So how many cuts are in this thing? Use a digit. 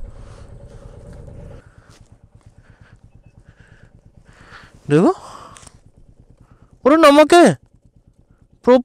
0